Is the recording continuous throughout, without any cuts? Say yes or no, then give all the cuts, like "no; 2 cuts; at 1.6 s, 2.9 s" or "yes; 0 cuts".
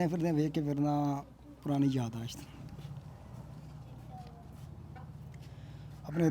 yes; 0 cuts